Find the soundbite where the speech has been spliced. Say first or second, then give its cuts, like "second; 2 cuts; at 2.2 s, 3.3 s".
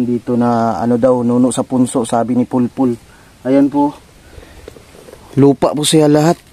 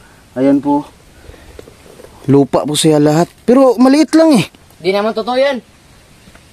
second; 1 cut; at 4.6 s